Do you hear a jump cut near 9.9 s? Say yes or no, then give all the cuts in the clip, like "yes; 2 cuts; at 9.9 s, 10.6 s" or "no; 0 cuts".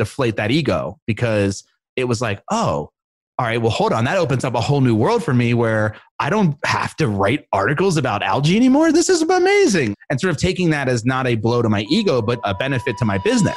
yes; 2 cuts; at 9.9 s, 12.4 s